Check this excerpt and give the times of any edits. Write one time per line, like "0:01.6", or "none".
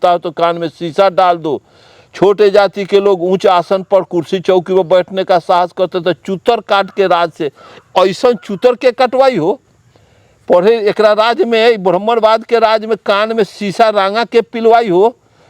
none